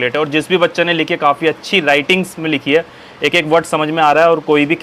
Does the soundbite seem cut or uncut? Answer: uncut